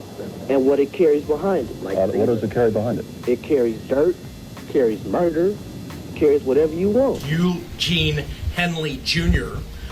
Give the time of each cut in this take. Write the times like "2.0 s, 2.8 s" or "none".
7.2 s